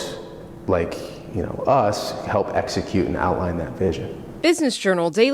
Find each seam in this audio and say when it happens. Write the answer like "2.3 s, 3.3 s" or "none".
4.2 s